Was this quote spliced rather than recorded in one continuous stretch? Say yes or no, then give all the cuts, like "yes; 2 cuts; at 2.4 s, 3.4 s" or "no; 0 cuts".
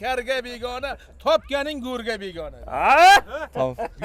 no; 0 cuts